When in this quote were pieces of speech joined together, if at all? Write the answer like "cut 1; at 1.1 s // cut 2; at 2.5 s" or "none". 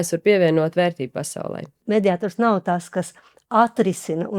cut 1; at 1.7 s